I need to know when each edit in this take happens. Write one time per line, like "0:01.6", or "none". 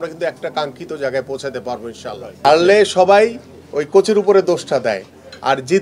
0:02.3